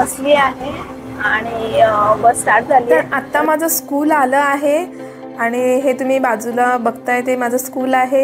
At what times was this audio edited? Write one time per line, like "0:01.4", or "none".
0:03.2

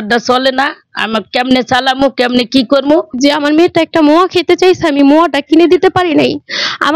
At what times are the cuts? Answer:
0:03.1

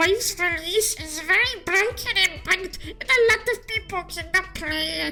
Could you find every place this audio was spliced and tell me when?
none

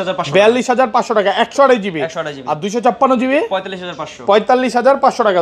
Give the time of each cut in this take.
none

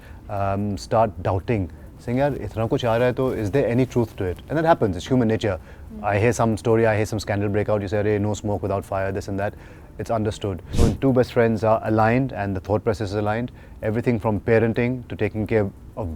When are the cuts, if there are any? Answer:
0:10.7

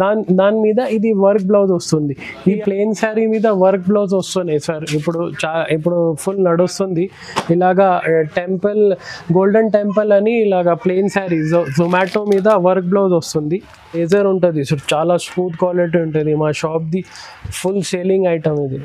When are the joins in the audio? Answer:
0:02.5
0:14.0

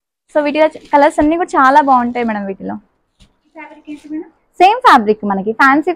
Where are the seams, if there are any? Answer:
0:03.7

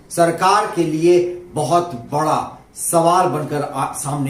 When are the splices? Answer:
none

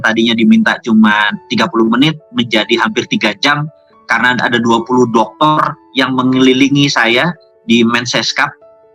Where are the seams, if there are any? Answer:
none

